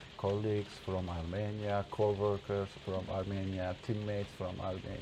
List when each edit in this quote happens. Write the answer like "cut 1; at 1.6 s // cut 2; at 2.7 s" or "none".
none